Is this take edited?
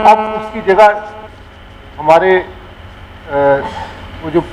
no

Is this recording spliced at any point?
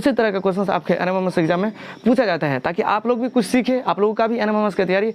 yes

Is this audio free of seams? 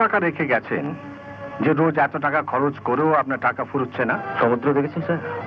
no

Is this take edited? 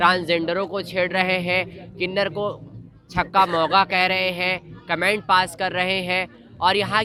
no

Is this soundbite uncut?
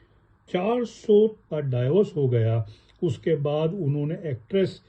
no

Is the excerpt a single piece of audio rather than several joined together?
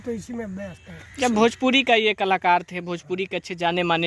yes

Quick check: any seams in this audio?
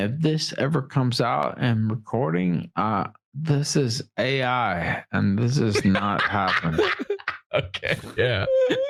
no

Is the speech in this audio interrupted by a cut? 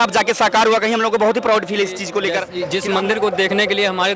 yes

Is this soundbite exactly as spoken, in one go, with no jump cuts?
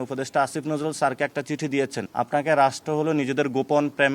no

